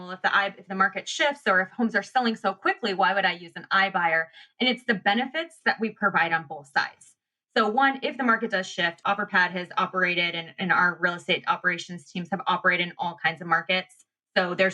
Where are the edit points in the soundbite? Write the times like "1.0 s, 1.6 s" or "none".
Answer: 9.0 s